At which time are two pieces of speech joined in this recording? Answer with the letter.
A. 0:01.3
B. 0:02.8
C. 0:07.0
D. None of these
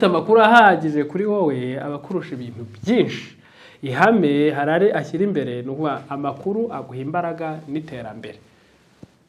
D